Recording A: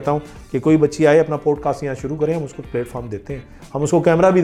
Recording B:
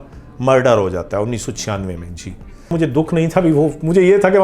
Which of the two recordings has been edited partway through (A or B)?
B